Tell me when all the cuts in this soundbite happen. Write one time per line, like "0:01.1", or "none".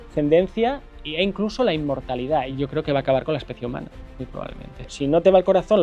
0:02.5
0:04.9